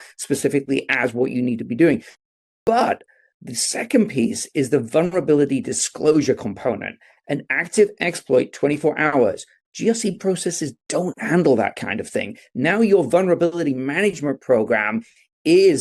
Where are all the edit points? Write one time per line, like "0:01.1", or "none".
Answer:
none